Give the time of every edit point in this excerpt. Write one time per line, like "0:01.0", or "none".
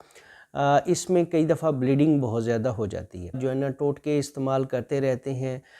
0:03.3